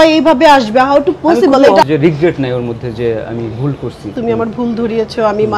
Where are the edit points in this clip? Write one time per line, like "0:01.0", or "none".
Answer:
0:01.8
0:04.1